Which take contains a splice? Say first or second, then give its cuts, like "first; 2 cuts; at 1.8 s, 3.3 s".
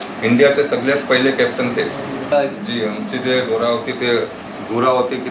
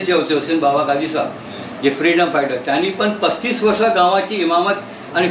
first; 1 cut; at 2.3 s